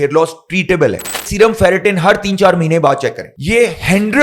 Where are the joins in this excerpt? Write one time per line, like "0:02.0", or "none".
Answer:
0:01.3
0:03.3